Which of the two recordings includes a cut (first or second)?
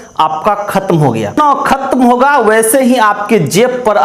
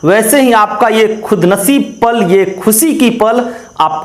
first